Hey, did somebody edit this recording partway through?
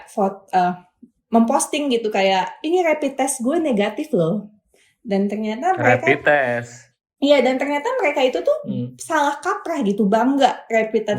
no; 0 cuts

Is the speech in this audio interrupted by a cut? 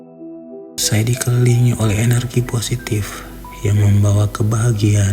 yes; 1 cut; at 0.9 s

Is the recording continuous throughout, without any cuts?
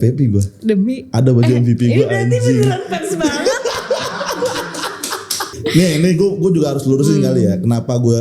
no; 1 cut; at 5.5 s

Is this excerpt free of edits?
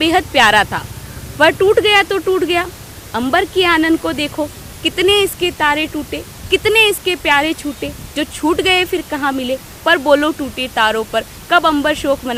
yes; 0 cuts

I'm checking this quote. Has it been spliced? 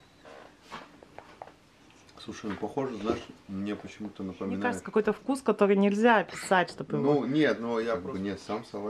yes; 2 cuts; at 4.8 s, 8.0 s

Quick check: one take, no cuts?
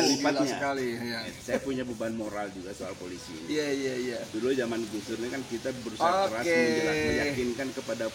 no; 1 cut; at 1.3 s

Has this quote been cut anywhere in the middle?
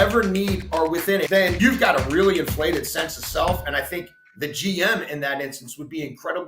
yes; 1 cut; at 1.4 s

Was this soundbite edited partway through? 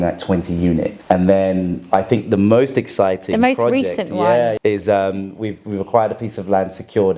yes; 2 cuts; at 1.0 s, 4.6 s

